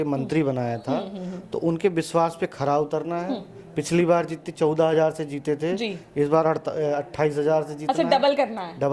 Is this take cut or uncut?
uncut